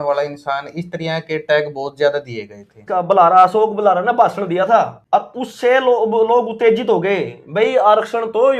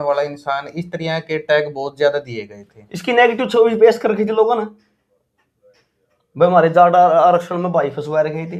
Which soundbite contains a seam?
first; 2 cuts; at 2.8 s, 5.0 s

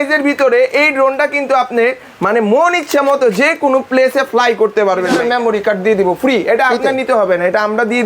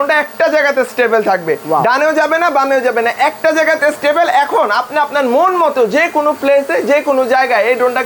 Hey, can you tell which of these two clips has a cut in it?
first; 1 cut; at 5.2 s

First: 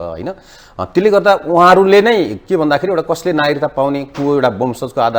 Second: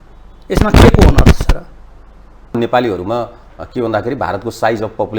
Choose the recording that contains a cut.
second; 1 cut; at 2.5 s

